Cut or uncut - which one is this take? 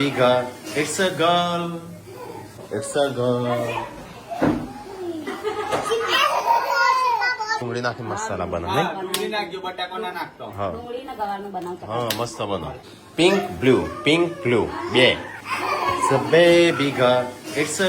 cut